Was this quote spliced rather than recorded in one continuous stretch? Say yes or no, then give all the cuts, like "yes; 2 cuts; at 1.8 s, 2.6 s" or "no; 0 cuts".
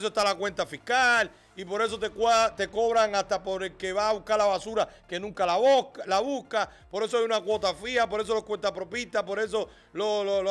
no; 0 cuts